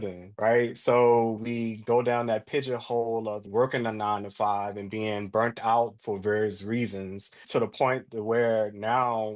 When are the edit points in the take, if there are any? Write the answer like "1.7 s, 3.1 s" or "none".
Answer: none